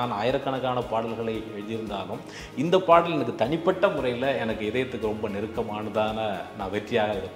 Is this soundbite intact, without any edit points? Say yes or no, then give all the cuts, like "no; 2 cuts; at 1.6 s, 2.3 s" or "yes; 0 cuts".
yes; 0 cuts